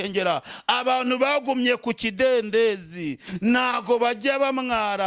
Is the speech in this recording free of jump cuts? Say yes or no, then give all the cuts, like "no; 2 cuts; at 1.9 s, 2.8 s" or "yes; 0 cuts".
yes; 0 cuts